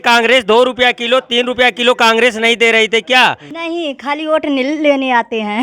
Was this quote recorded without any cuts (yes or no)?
no